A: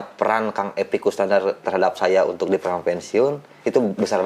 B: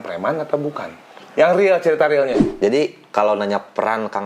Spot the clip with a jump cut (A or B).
B